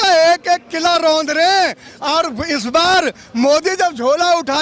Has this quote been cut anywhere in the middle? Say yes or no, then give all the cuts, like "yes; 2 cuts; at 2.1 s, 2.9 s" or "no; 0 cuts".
no; 0 cuts